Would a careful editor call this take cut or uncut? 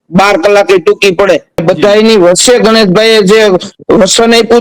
cut